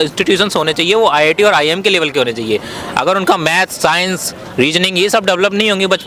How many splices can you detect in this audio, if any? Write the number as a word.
zero